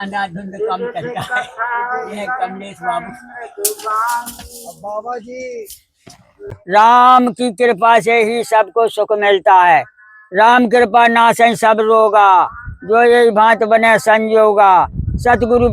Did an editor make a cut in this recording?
yes; 1 cut; at 6.6 s

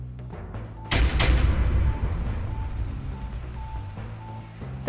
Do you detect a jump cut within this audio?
yes; 1 cut; at 0.9 s

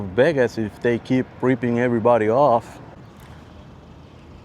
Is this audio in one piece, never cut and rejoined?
no; 1 cut; at 2.9 s

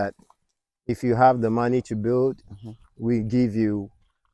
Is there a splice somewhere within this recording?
no; 0 cuts

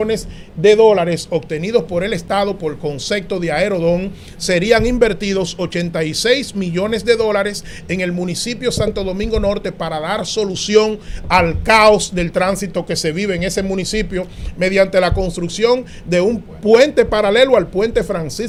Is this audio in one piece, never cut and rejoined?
yes; 0 cuts

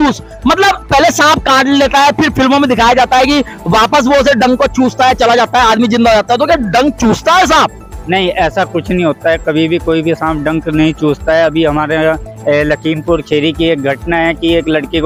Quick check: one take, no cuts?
yes; 0 cuts

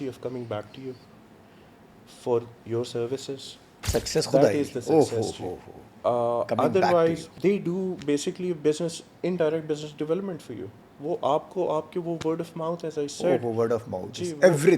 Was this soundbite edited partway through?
yes; 1 cut; at 7.3 s

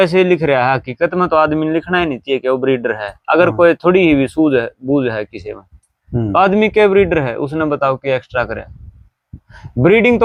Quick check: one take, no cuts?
yes; 0 cuts

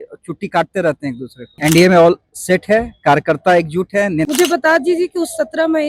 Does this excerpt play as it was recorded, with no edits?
no; 2 cuts; at 1.5 s, 4.3 s

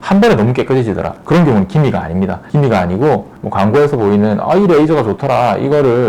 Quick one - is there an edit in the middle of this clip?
yes; 1 cut; at 3.3 s

